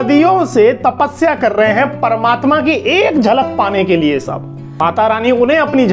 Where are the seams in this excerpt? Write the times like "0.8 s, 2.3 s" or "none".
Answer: 4.9 s